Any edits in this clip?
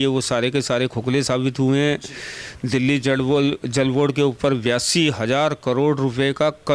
no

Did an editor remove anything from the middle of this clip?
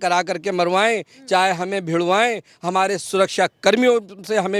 no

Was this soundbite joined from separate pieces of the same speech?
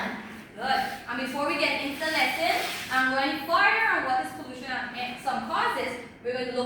no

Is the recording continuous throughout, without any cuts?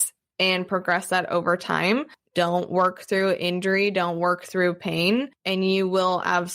no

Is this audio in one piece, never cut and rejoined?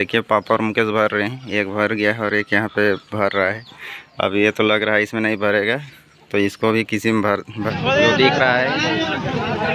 no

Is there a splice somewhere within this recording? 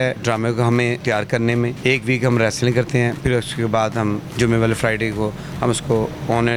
no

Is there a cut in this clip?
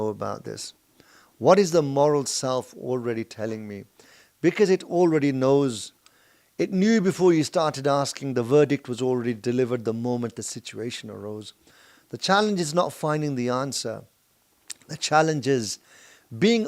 no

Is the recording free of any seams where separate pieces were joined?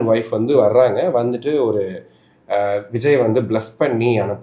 yes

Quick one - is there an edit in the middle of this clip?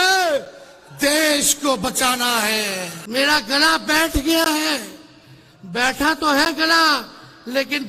yes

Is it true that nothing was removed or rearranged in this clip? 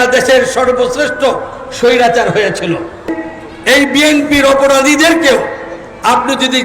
no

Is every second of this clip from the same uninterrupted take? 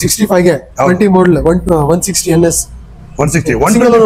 yes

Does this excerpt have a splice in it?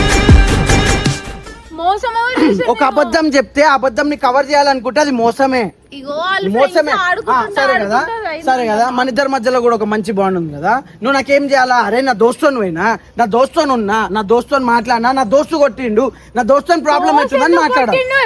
no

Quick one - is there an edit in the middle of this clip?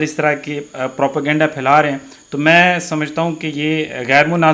no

